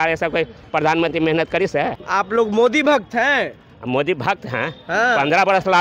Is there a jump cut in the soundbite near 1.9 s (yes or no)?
yes